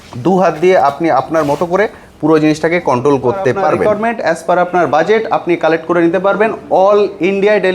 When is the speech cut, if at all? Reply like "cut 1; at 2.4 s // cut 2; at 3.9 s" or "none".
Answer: cut 1; at 3.8 s